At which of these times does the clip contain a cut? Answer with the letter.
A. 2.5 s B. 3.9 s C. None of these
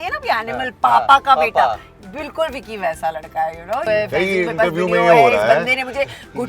B